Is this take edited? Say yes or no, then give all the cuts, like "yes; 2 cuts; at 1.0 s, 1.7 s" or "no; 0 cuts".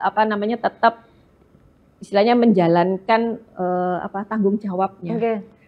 no; 0 cuts